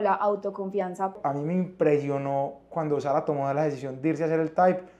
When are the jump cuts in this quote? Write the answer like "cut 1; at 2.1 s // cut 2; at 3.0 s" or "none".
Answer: cut 1; at 1.2 s